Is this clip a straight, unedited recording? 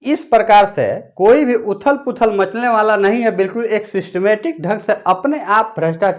yes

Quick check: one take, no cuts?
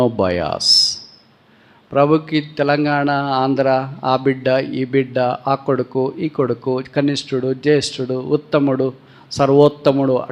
yes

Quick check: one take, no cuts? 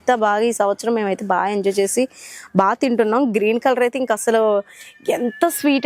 yes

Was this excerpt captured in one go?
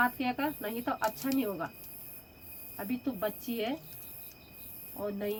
yes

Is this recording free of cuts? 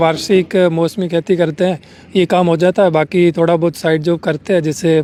yes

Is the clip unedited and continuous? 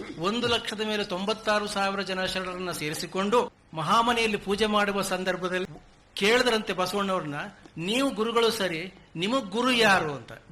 no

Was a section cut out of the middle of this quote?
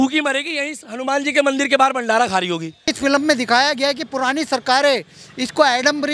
yes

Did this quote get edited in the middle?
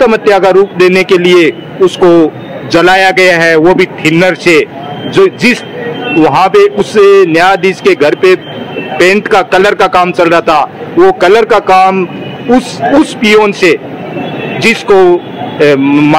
no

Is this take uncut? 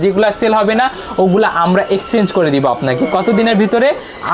yes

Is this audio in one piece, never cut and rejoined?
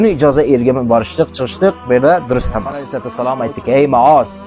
no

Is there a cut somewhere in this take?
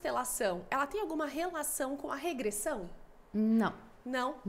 no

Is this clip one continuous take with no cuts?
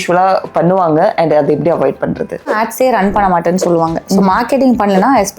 no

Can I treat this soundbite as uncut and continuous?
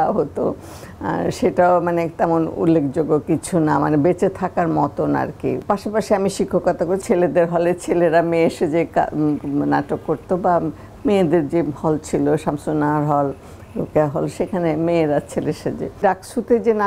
no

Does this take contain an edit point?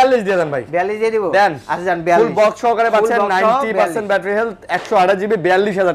no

